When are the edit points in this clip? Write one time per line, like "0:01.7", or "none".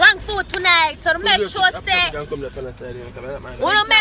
none

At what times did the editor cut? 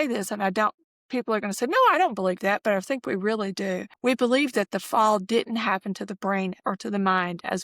0:03.9
0:06.5

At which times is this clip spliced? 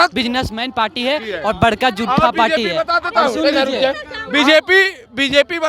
none

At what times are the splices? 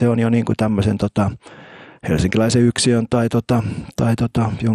none

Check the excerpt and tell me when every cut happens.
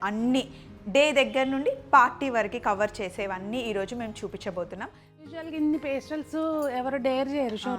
0:05.2

